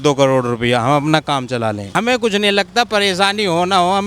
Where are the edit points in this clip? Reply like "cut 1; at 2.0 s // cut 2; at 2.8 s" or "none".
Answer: cut 1; at 1.9 s